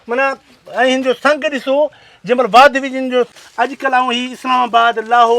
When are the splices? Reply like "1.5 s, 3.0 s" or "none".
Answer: 3.3 s